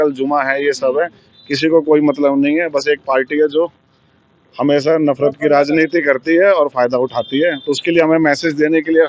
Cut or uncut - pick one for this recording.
uncut